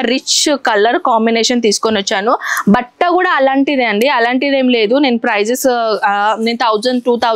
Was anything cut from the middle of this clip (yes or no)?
no